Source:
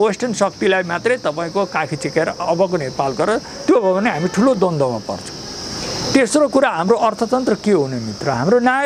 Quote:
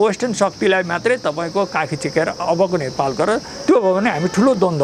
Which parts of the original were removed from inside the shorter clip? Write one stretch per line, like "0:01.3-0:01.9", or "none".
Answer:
none

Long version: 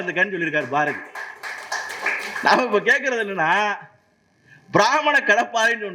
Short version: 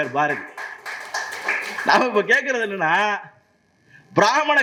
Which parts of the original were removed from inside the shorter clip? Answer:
none

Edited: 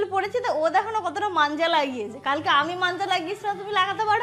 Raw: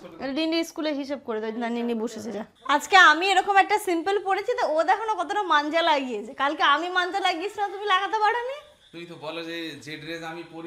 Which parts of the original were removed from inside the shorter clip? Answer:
none

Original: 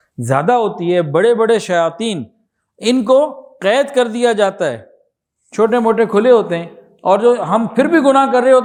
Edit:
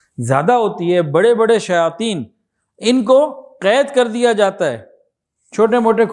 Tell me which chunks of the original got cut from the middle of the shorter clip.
none

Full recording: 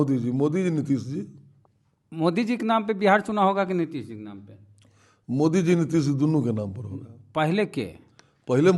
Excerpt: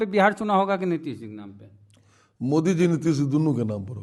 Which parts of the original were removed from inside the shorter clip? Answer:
none

